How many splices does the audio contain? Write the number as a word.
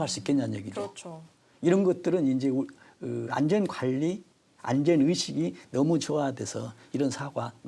zero